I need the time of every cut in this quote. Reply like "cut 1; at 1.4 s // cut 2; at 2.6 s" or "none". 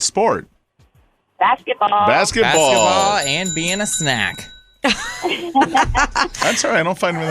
cut 1; at 6.3 s